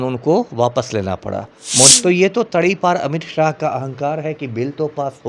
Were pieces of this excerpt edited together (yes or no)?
yes